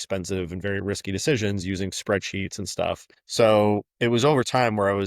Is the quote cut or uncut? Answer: cut